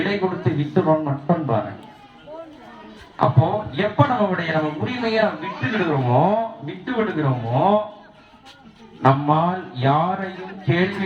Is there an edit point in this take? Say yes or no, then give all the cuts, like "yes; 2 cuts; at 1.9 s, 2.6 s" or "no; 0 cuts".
no; 0 cuts